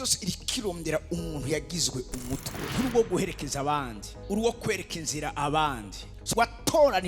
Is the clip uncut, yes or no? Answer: no